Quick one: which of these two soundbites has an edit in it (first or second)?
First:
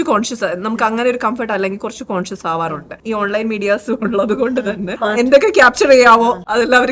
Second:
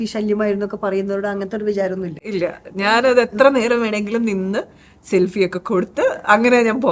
first